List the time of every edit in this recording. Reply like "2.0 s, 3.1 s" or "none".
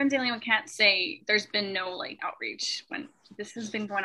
1.1 s